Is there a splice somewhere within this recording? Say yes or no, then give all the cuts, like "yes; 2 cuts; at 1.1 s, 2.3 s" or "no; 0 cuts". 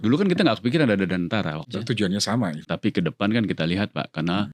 yes; 2 cuts; at 1.7 s, 2.6 s